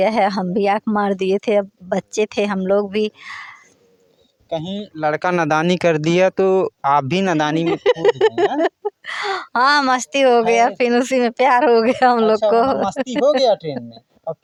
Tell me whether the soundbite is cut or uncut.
uncut